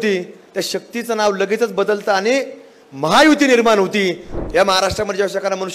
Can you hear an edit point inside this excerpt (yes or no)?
yes